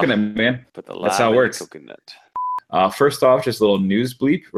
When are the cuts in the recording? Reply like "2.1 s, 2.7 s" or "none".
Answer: 2.3 s